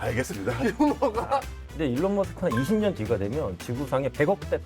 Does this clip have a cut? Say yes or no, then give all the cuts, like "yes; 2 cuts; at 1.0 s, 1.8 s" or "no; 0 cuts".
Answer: yes; 1 cut; at 1.6 s